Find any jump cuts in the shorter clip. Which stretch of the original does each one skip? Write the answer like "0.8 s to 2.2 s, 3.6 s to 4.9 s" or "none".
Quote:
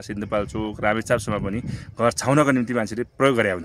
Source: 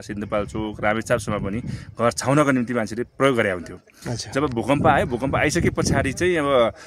none